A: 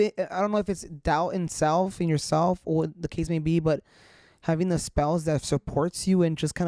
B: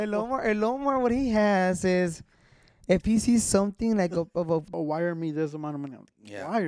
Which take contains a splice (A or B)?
B